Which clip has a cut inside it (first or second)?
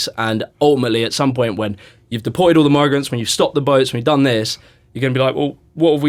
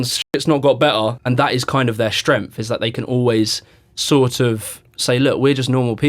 second